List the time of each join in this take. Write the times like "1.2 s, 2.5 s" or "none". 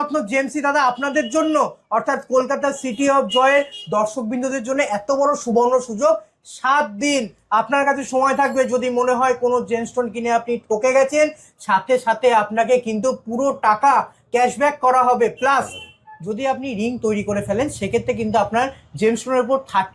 none